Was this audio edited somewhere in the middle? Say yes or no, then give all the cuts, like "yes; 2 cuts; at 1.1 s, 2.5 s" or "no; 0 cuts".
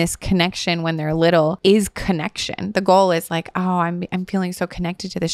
yes; 1 cut; at 1.6 s